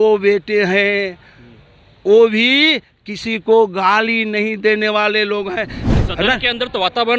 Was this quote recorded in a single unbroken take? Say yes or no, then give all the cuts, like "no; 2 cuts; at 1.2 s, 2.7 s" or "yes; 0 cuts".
no; 1 cut; at 5.8 s